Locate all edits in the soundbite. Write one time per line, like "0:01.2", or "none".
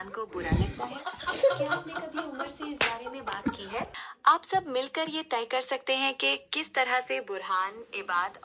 0:04.0

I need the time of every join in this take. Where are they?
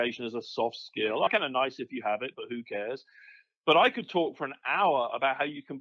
0:01.3

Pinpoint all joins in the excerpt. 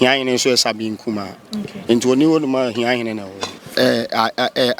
0:03.5

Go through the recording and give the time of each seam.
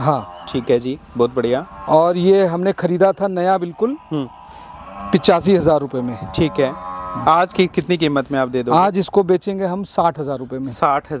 none

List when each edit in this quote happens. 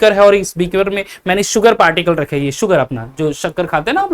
none

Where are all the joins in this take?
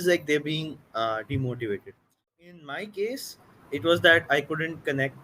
0:02.4

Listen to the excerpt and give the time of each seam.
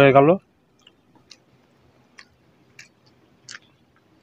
0:01.2

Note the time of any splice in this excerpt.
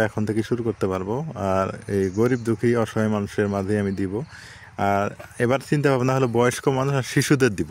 none

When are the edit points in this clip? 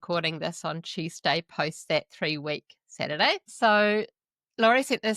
0:03.5

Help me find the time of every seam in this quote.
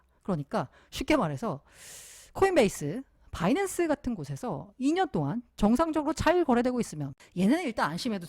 0:07.2

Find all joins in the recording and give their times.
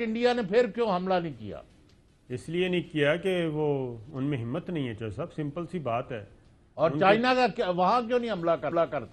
none

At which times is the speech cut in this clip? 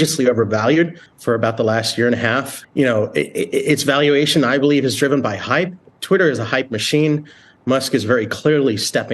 0:01.1
0:02.6

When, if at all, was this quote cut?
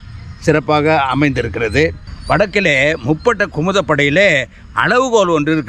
0:02.1

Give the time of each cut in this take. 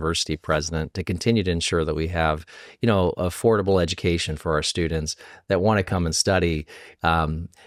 none

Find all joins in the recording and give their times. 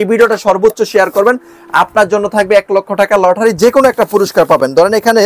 none

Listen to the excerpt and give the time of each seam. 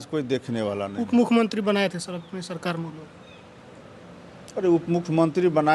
none

